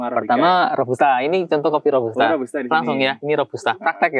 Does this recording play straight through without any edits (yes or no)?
yes